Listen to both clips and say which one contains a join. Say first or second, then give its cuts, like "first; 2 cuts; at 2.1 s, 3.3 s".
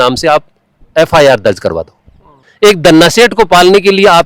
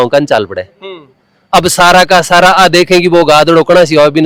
first; 1 cut; at 2.4 s